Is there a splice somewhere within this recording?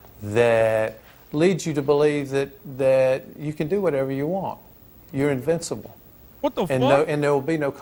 no; 0 cuts

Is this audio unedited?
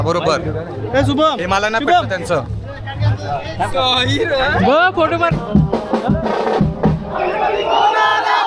yes; 0 cuts

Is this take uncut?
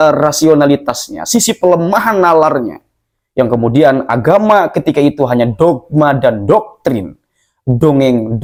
yes; 0 cuts

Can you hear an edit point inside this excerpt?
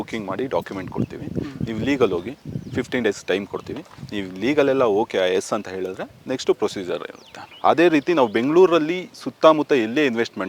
yes; 1 cut; at 7.4 s

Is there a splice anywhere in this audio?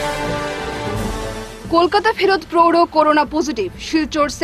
no; 0 cuts

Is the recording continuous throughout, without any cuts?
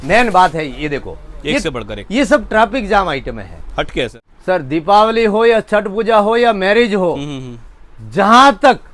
no; 1 cut; at 4.2 s

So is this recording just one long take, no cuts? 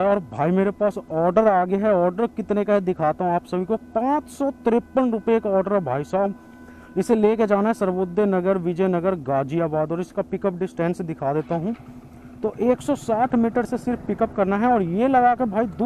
yes; 0 cuts

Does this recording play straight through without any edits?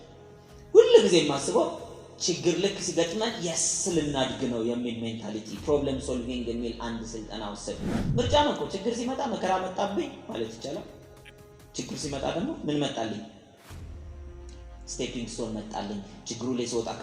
no; 1 cut; at 8.0 s

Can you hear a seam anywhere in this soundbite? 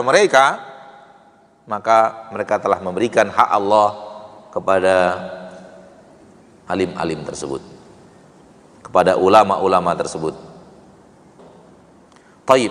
yes; 1 cut; at 11.4 s

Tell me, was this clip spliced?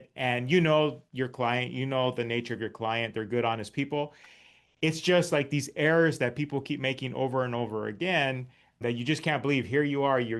yes; 1 cut; at 8.8 s

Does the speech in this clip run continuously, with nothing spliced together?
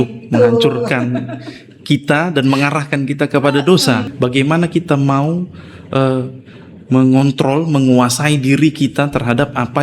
no; 1 cut; at 4.1 s

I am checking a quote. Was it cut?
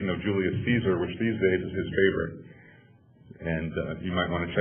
no; 0 cuts

